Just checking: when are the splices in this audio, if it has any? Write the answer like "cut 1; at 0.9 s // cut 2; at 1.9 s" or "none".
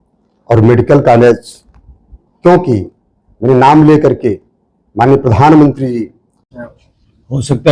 cut 1; at 6.4 s